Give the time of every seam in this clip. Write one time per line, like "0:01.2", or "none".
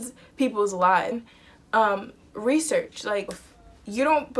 0:01.2